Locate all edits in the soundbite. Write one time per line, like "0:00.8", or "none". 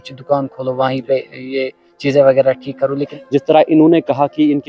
0:03.0